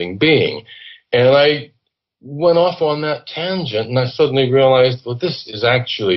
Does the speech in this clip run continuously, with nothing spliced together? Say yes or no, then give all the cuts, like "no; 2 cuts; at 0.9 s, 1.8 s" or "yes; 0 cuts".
yes; 0 cuts